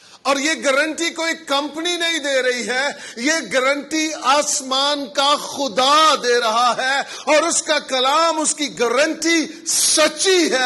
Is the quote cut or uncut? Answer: uncut